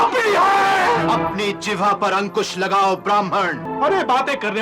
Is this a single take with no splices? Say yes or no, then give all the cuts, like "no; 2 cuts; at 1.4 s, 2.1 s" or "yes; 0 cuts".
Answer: no; 2 cuts; at 1.0 s, 3.6 s